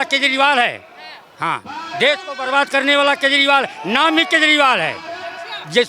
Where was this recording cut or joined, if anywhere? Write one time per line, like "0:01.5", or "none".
none